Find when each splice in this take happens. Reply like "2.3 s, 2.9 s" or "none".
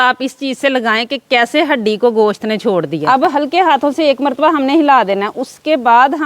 3.0 s